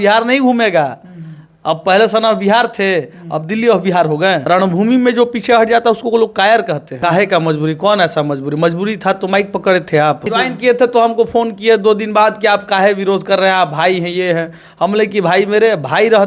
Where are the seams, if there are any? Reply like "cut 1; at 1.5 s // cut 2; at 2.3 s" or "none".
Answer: cut 1; at 4.4 s // cut 2; at 6.9 s // cut 3; at 10.3 s